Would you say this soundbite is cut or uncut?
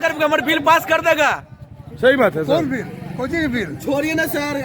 uncut